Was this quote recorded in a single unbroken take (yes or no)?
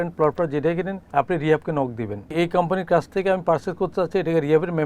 no